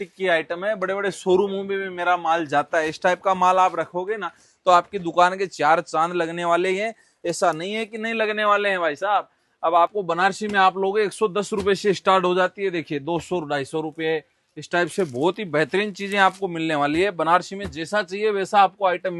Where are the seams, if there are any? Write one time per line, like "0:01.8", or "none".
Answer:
0:09.9

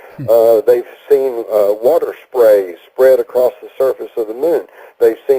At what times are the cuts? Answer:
0:01.2

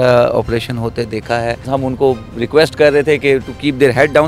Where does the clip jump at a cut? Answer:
0:01.7

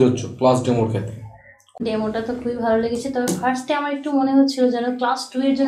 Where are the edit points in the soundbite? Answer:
0:01.7

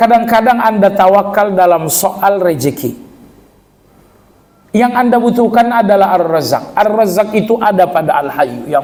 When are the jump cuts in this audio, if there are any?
none

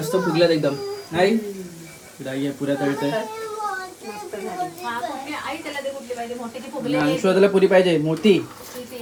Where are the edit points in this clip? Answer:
none

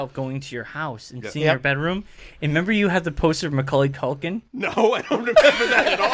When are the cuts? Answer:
none

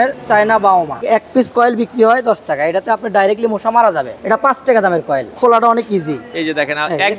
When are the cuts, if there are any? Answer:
0:01.0
0:04.1
0:05.3

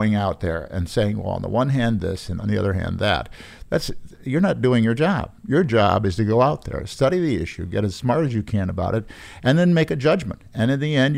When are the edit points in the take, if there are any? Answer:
0:02.4

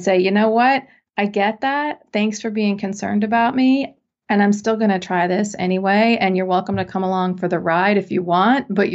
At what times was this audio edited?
none

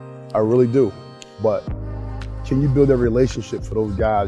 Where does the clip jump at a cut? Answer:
none

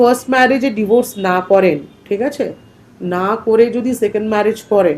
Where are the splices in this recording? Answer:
0:01.9

